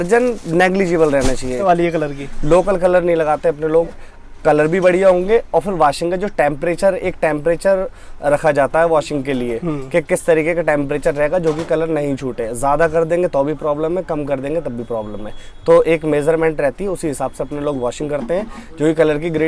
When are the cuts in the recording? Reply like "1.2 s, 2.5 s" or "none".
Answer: 1.6 s